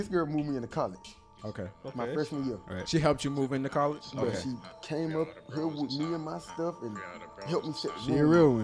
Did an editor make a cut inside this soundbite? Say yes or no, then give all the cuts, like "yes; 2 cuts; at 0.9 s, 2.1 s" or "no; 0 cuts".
no; 0 cuts